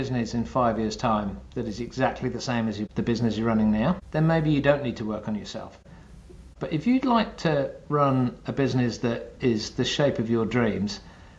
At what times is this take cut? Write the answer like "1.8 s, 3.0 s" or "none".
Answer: 2.9 s, 4.0 s, 6.0 s